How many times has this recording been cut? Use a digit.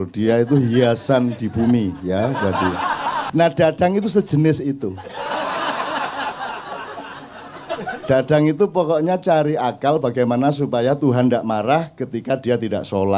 1